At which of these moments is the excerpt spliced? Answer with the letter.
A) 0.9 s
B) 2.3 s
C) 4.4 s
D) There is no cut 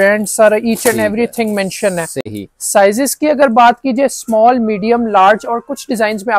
D